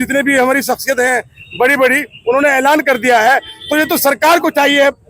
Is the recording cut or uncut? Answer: uncut